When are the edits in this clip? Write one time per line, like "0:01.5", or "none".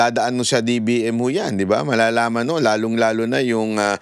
none